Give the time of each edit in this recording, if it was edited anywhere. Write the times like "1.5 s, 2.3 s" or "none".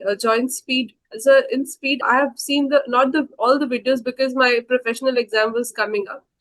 1.0 s, 2.0 s